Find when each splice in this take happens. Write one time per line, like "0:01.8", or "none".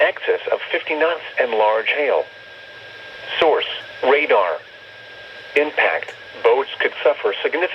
0:01.0
0:06.2